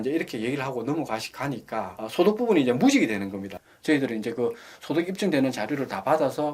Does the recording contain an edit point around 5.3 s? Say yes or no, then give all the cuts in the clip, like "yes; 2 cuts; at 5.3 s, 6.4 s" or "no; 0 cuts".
no; 1 cut; at 3.5 s